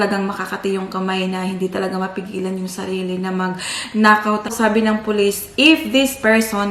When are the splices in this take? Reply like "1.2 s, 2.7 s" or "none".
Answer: 4.5 s